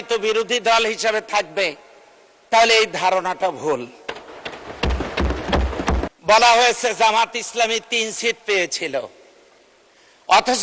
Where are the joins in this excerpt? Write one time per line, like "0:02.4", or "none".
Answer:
0:06.1